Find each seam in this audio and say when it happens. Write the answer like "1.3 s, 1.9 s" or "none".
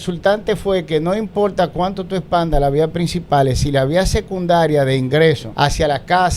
5.5 s